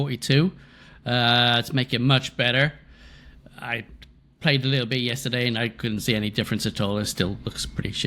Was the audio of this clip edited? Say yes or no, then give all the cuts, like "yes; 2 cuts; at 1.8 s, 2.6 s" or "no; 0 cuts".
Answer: no; 0 cuts